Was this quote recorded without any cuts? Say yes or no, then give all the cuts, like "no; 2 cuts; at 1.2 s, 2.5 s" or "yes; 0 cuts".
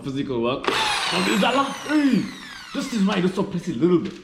yes; 0 cuts